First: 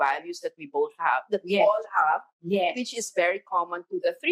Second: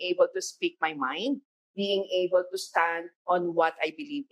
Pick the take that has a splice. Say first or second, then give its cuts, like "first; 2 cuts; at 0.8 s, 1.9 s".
second; 2 cuts; at 1.4 s, 3.1 s